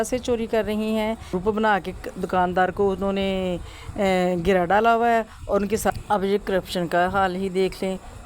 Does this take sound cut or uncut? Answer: cut